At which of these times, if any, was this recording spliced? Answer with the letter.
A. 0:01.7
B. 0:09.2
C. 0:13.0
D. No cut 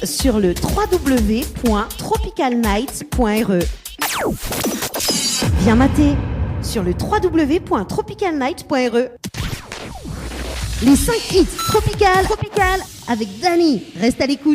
B